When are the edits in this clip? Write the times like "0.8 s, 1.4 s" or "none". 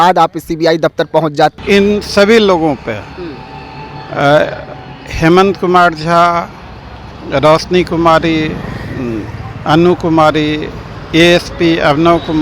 1.5 s